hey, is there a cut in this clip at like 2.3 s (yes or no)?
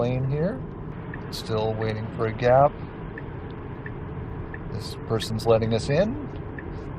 no